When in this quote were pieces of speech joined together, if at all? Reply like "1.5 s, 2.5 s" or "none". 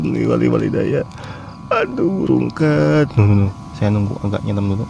3.6 s